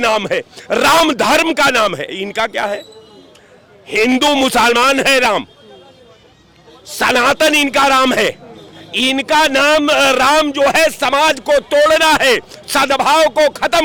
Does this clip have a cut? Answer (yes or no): no